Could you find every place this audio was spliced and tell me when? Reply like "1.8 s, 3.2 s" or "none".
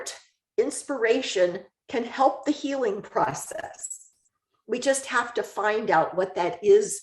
none